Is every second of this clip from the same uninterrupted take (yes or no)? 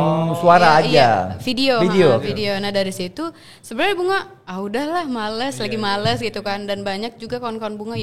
yes